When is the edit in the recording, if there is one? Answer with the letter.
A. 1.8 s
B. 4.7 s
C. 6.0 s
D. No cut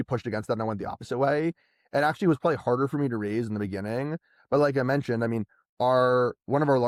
D